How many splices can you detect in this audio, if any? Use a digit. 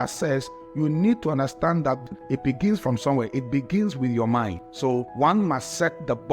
1